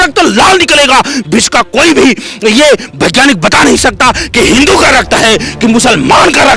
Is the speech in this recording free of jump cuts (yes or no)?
yes